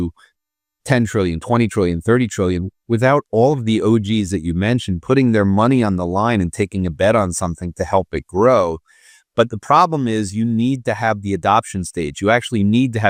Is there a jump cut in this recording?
no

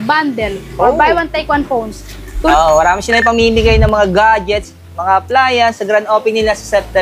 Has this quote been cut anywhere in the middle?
yes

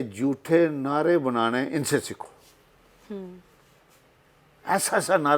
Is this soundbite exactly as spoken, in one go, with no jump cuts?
yes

